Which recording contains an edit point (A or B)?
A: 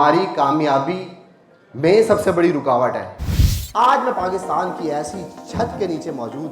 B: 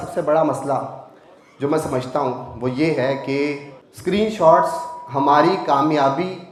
A